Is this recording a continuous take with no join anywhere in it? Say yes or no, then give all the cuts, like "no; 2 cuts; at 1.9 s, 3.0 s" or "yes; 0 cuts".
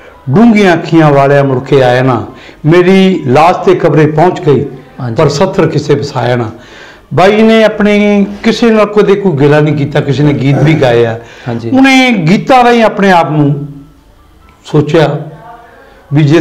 yes; 0 cuts